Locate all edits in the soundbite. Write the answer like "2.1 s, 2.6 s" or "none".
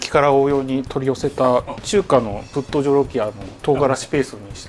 1.8 s, 3.5 s